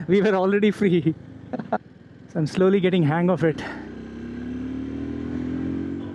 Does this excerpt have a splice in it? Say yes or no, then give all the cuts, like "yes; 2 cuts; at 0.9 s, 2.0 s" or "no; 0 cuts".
yes; 1 cut; at 1.8 s